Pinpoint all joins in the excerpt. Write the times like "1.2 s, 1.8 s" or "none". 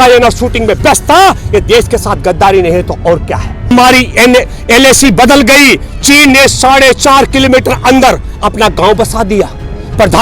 3.7 s